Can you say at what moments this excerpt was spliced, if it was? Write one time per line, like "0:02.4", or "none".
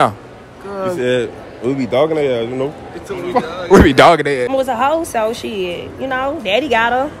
0:04.5